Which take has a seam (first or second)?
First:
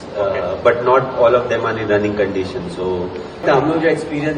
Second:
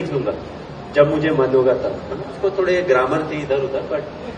first